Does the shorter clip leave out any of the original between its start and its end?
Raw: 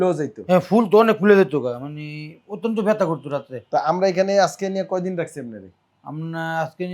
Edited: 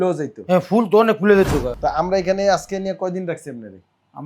yes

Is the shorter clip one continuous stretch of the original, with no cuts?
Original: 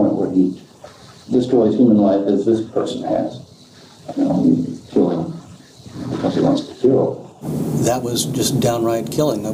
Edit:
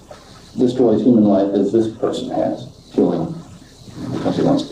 no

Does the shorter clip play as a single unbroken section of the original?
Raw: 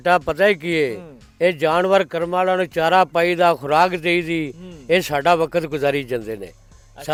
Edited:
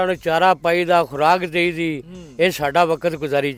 yes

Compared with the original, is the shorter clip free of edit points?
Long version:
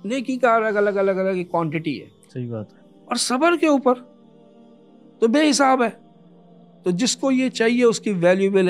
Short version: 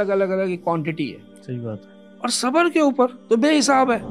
no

